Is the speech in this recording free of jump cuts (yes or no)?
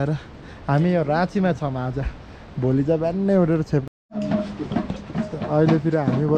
no